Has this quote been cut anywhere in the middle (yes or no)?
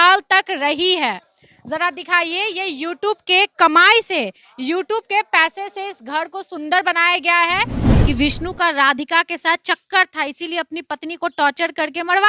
yes